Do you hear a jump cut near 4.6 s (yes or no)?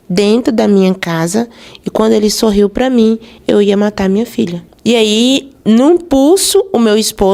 no